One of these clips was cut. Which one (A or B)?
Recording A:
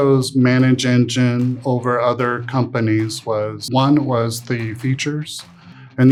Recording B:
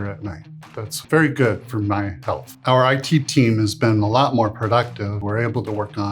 B